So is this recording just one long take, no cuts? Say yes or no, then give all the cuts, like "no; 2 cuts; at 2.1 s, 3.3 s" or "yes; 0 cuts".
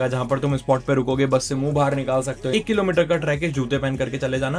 no; 1 cut; at 2.5 s